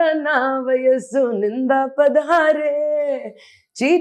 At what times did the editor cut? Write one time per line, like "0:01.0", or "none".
none